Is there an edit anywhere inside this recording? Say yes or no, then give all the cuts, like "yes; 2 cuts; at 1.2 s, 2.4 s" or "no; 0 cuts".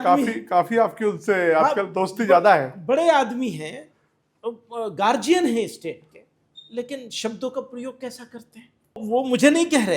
yes; 1 cut; at 9.0 s